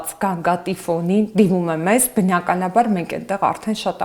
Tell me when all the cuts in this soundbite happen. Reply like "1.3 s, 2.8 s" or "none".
none